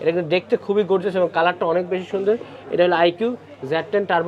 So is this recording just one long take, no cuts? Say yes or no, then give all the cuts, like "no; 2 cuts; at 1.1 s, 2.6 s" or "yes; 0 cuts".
yes; 0 cuts